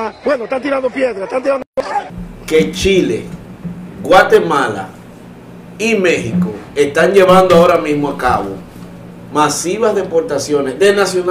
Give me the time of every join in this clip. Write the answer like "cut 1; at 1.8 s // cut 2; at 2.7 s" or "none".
cut 1; at 2.1 s